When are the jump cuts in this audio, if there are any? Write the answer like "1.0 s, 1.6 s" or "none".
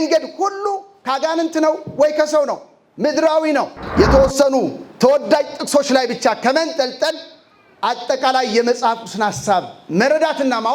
3.8 s

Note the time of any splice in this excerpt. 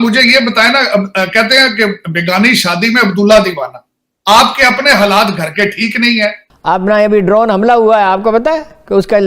6.4 s

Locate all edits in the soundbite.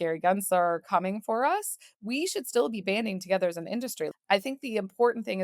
4.1 s

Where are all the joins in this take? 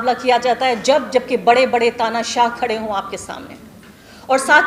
none

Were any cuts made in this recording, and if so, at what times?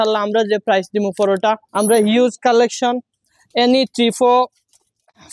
1.6 s

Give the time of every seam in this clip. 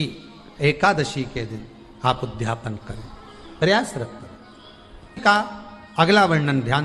5.2 s

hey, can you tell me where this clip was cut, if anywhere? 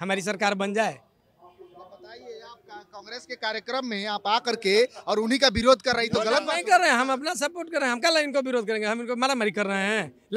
none

